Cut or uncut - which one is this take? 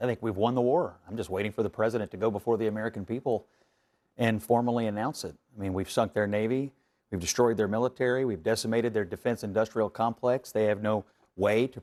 uncut